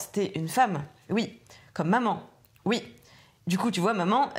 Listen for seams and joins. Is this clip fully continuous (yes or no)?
yes